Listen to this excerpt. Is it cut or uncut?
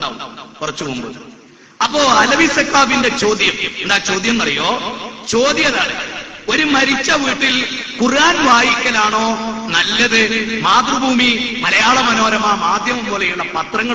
cut